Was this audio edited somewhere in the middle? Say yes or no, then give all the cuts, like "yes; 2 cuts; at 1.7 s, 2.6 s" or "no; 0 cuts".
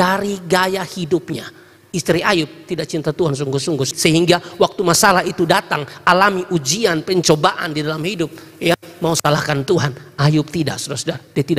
no; 0 cuts